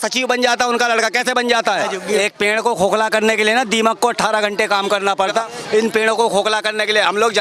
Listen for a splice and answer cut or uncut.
cut